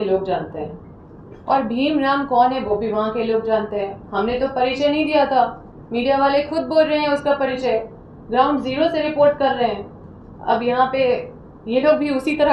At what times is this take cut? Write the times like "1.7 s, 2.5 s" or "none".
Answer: none

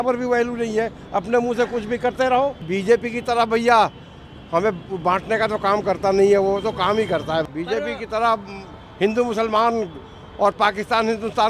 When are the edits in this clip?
2.6 s, 7.4 s

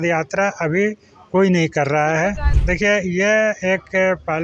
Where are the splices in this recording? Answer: 2.5 s

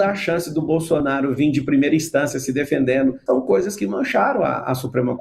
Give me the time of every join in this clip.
3.2 s

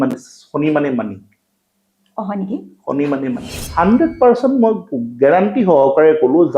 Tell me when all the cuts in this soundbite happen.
3.7 s

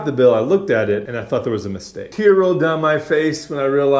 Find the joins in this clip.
1.1 s, 2.0 s

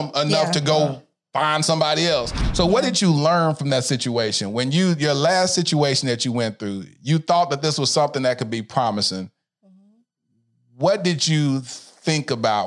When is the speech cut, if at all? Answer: 2.4 s

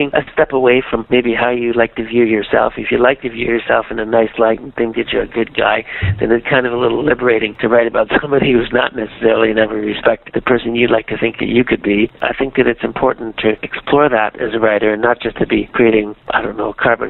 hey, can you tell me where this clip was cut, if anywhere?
none

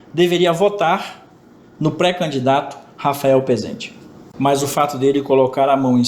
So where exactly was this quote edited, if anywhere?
4.2 s

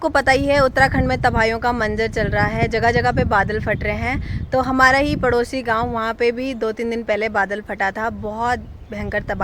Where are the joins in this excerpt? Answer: none

